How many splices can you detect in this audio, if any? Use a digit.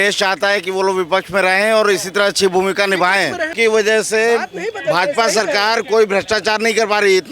1